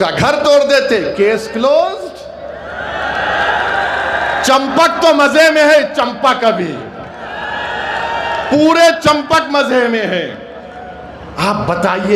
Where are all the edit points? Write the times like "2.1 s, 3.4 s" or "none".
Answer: none